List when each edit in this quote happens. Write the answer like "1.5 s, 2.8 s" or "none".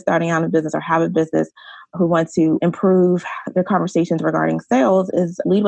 2.6 s